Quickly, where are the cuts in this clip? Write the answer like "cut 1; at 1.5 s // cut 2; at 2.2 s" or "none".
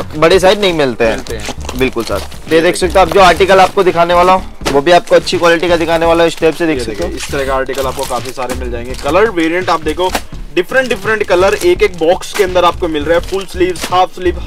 none